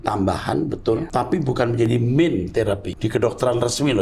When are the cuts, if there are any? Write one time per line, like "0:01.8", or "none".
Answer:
0:01.1
0:02.9

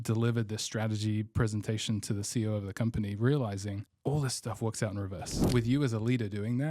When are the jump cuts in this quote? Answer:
0:03.9
0:05.4

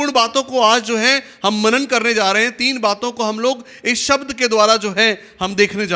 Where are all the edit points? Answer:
none

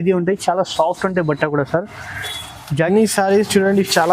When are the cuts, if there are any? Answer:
0:02.9

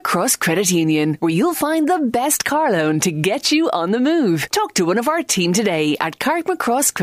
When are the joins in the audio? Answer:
none

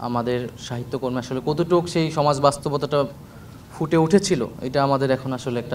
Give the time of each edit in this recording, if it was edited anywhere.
none

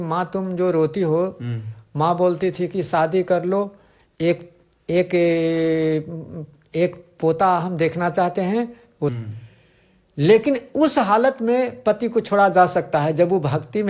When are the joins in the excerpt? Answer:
0:09.2

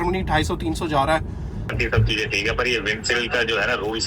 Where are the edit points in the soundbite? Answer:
0:01.8

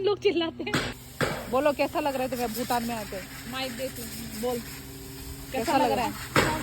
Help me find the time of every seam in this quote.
0:01.0

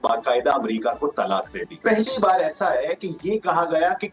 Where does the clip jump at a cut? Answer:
0:01.8

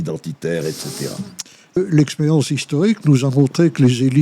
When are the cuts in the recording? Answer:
0:01.8

